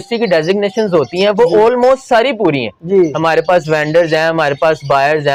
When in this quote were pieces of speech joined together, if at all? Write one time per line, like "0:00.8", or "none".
none